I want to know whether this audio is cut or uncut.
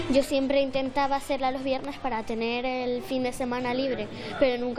uncut